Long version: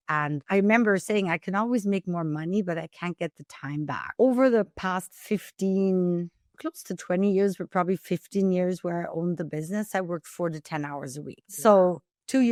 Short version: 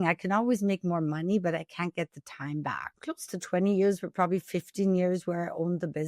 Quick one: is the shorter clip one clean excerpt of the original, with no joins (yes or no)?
no